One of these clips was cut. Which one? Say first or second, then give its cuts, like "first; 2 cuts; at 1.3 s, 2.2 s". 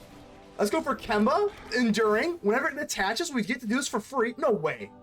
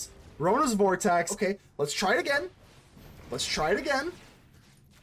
second; 1 cut; at 1.3 s